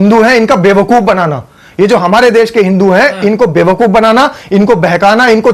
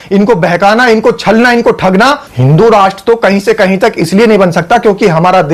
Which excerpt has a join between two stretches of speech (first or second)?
second